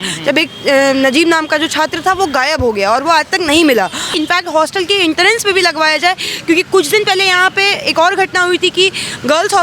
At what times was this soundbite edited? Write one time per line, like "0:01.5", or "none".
0:04.1